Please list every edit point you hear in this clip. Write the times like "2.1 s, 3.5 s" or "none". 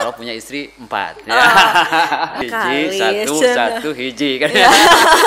2.4 s